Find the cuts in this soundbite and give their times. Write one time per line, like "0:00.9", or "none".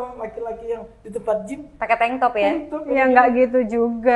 none